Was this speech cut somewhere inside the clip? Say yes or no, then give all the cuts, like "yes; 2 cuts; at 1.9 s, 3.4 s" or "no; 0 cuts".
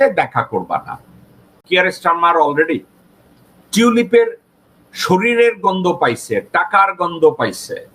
yes; 1 cut; at 1.6 s